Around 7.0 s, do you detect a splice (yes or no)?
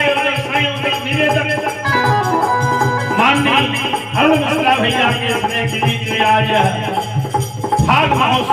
no